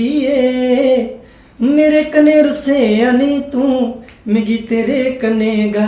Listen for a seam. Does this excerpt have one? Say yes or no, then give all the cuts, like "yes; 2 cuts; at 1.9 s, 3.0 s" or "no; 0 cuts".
no; 0 cuts